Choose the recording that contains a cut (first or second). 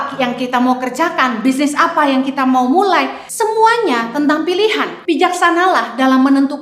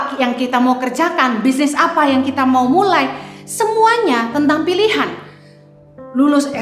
first